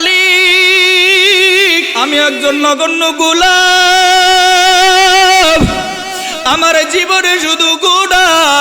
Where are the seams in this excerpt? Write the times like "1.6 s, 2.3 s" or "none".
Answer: 1.9 s